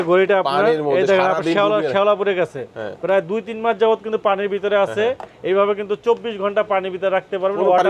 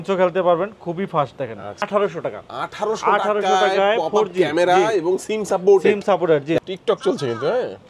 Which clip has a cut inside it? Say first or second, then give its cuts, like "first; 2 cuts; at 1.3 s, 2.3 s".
second; 2 cuts; at 1.9 s, 6.6 s